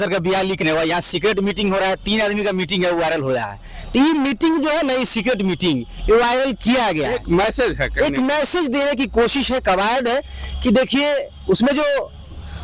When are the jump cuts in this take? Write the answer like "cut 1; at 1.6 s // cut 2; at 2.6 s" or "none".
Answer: none